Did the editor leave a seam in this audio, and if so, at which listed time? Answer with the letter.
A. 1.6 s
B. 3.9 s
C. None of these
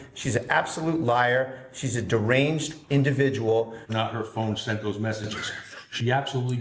B